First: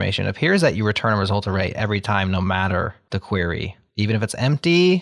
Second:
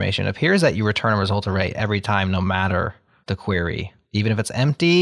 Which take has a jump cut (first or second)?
first